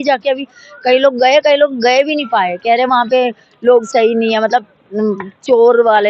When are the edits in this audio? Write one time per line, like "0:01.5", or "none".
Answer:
none